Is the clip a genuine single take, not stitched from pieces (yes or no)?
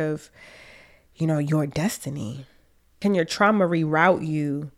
no